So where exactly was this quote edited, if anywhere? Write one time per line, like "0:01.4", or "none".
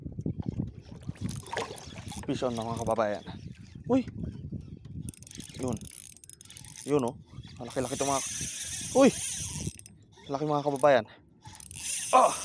none